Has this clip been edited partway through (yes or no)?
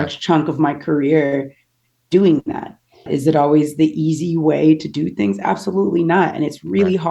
yes